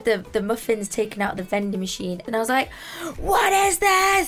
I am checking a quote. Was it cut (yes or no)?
yes